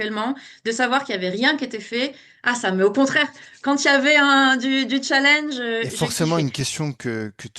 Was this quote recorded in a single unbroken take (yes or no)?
no